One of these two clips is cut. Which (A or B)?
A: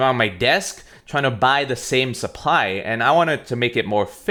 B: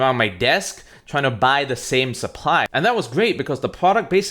B